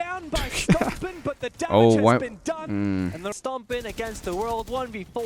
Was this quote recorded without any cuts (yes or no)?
no